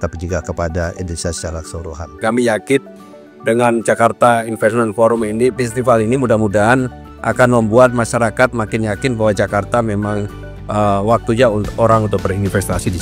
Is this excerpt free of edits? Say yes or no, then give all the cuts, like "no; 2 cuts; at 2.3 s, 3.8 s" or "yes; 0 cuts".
no; 1 cut; at 2.2 s